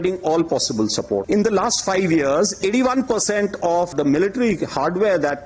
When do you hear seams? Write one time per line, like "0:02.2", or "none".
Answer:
0:01.2
0:03.9